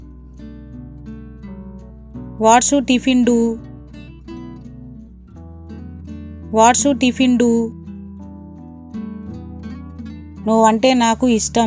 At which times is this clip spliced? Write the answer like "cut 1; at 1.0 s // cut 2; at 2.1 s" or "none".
none